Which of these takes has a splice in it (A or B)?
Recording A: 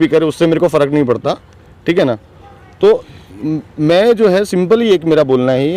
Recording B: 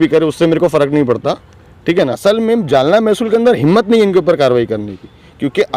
B